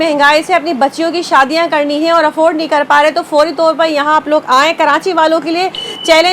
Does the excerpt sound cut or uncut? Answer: uncut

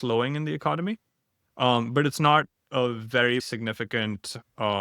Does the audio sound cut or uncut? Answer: cut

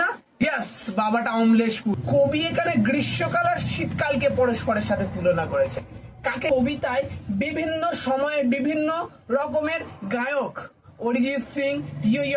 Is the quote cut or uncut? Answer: cut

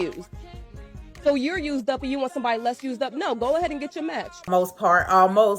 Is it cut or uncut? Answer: cut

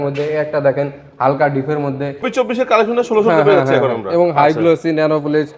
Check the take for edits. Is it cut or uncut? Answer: cut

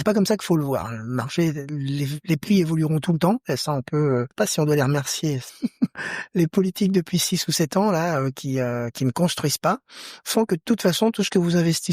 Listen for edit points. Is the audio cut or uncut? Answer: cut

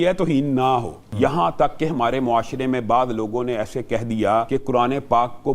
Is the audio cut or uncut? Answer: cut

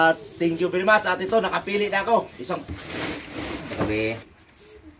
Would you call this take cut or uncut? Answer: cut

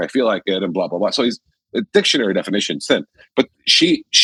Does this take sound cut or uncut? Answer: uncut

